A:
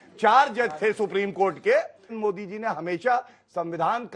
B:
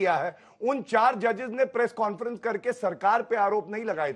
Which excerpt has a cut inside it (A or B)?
A